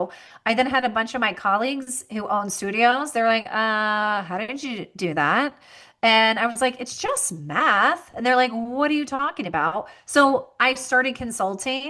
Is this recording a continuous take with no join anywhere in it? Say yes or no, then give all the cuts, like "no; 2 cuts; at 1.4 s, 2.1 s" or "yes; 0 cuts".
yes; 0 cuts